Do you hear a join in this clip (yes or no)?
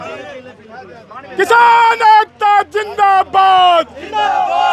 no